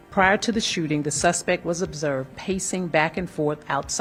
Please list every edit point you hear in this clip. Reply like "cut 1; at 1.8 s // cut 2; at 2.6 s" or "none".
none